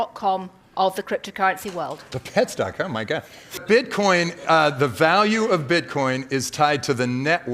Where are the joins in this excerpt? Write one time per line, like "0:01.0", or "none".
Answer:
0:02.0
0:03.6